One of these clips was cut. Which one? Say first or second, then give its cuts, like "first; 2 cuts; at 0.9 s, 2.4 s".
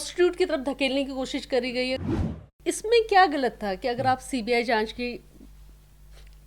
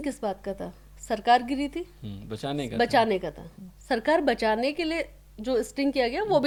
first; 1 cut; at 2.0 s